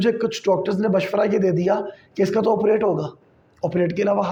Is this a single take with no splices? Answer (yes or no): yes